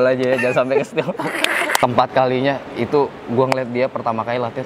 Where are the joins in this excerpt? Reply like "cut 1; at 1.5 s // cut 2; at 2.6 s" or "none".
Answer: cut 1; at 1.8 s